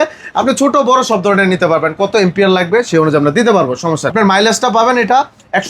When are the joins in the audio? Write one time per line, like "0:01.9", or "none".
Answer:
0:04.1